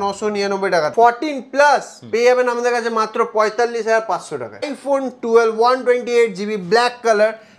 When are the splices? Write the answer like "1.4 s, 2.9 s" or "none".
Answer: 0.9 s, 4.6 s